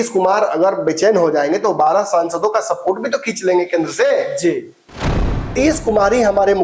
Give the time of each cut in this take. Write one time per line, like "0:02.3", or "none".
0:05.1